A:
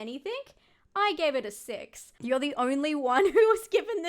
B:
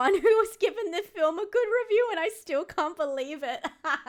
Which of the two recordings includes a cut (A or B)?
A